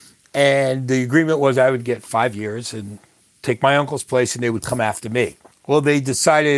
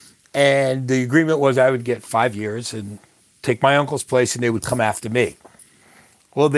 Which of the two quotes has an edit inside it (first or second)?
first